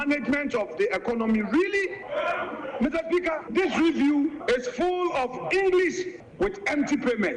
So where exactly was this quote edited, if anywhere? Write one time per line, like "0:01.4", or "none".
0:02.0
0:03.4
0:04.4
0:06.2